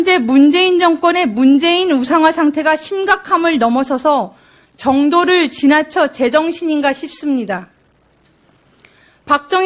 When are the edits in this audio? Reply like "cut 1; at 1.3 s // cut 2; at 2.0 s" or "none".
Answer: cut 1; at 5.4 s